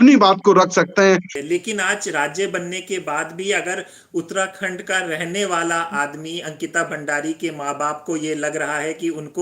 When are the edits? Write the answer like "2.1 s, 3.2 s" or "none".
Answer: 1.3 s